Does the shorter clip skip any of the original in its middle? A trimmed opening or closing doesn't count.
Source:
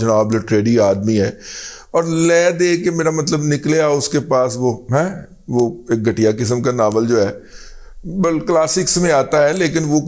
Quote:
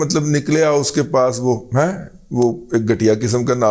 no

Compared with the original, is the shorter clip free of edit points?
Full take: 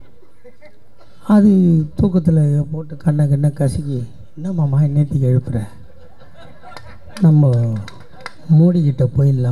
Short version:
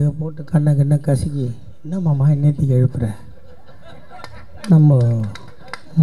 yes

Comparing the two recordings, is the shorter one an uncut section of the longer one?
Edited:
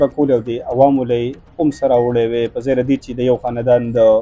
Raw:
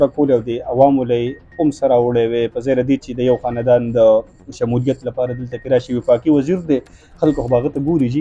yes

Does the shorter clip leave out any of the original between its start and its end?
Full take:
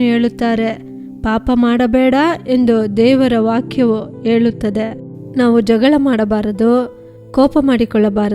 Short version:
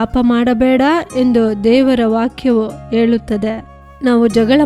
no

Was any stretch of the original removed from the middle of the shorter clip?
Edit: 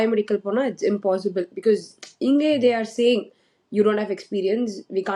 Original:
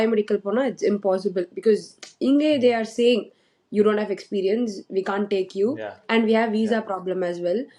no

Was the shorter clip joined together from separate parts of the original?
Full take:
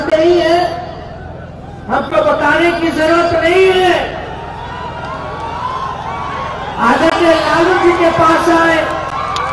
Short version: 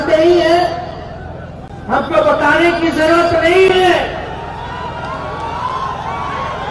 no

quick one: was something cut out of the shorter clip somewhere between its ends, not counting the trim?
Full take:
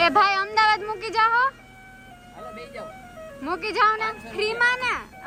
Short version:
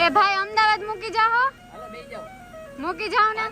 yes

